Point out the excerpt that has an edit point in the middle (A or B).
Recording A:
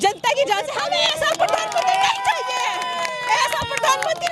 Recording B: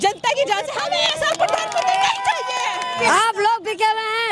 B